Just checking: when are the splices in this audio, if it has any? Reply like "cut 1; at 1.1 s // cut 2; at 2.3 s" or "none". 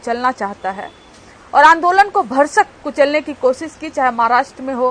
none